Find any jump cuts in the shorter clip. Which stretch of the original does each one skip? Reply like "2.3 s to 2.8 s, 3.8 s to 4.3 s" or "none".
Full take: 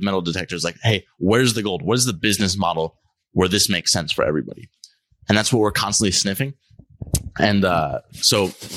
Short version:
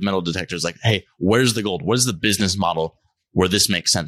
none